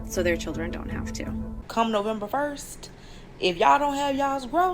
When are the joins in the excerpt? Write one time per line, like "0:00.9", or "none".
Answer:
0:01.6